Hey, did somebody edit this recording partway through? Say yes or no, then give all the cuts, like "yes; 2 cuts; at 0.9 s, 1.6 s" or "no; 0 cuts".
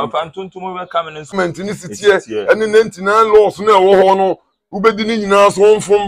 yes; 1 cut; at 1.3 s